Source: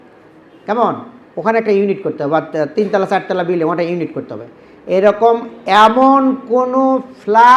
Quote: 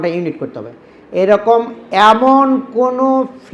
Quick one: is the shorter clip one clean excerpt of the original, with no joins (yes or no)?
yes